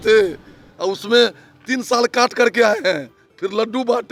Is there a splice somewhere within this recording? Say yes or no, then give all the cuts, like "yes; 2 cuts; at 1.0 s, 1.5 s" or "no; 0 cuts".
no; 0 cuts